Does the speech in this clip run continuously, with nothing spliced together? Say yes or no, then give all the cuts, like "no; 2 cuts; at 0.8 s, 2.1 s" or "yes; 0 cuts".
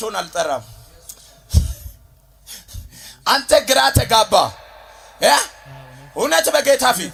yes; 0 cuts